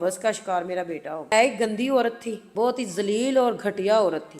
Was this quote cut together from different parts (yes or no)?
yes